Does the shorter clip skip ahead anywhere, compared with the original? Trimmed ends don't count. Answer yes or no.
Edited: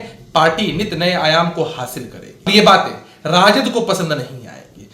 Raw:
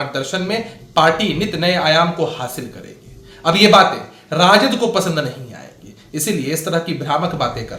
yes